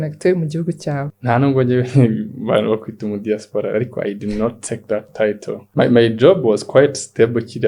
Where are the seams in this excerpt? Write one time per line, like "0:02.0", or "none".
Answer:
0:01.1
0:05.6